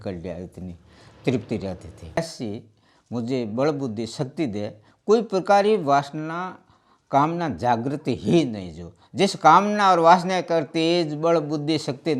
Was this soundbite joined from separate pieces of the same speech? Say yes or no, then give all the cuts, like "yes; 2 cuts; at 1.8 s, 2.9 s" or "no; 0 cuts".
yes; 1 cut; at 2.2 s